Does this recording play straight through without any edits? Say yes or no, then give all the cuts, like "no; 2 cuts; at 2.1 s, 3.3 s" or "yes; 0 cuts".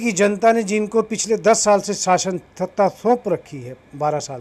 yes; 0 cuts